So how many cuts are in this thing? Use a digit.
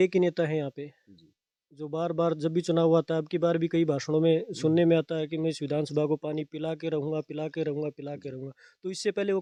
0